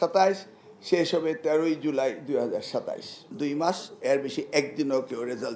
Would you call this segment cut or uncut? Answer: cut